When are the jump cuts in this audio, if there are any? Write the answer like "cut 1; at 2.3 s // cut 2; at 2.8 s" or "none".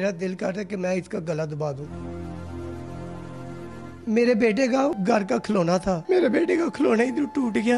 cut 1; at 1.8 s // cut 2; at 4.0 s // cut 3; at 5.0 s